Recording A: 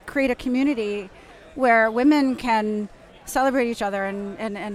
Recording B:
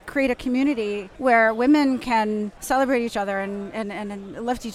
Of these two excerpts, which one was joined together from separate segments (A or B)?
B